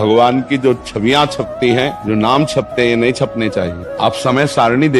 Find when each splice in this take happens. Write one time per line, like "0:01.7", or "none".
0:02.0
0:03.8